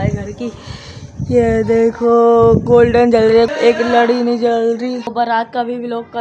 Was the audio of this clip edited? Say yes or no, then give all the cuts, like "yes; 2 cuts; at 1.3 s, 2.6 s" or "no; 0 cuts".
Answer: yes; 2 cuts; at 3.5 s, 5.0 s